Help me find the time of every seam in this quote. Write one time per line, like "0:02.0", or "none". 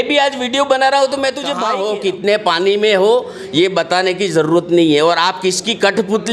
0:01.7